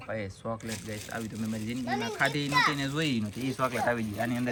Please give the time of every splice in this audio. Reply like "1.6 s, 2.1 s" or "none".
none